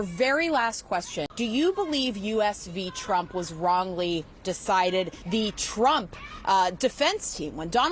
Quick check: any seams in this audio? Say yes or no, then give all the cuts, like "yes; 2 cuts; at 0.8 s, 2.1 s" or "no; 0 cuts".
yes; 2 cuts; at 1.3 s, 5.2 s